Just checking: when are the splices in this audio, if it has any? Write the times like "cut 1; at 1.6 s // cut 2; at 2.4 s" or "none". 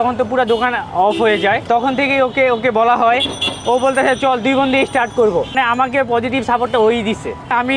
cut 1; at 1.6 s // cut 2; at 5.5 s